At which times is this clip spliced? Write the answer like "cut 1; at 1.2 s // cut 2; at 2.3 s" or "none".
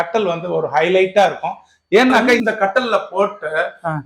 cut 1; at 2.4 s